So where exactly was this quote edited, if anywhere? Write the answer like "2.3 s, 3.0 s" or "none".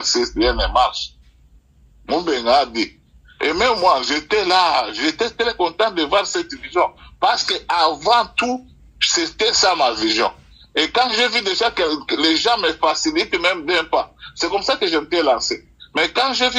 none